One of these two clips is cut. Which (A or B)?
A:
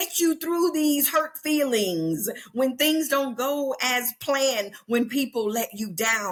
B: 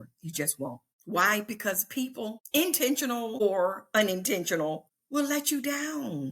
B